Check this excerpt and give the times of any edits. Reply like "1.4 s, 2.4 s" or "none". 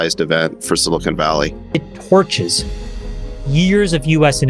1.9 s